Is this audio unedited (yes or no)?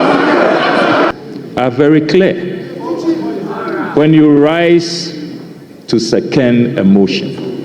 no